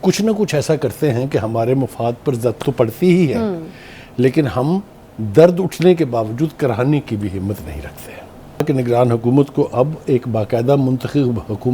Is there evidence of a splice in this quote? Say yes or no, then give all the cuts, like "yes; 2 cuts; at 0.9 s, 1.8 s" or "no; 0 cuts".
yes; 1 cut; at 8.6 s